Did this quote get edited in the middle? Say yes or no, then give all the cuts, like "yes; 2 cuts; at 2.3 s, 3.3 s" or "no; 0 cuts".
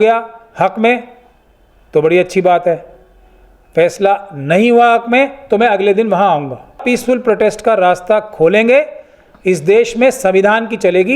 yes; 1 cut; at 6.8 s